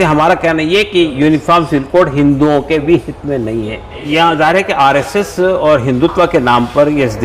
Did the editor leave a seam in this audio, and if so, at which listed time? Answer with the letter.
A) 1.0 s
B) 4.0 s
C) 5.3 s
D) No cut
B